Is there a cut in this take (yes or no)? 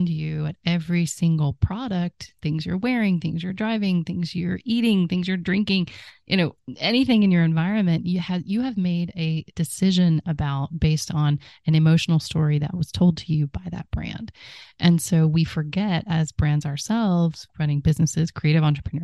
no